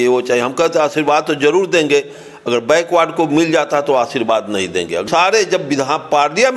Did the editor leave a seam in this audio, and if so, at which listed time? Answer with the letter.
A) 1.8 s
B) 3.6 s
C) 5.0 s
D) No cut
C